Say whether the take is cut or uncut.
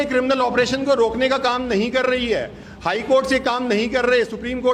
uncut